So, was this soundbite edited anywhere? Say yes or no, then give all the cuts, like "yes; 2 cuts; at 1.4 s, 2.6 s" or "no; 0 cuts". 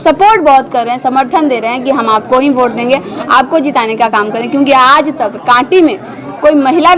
no; 0 cuts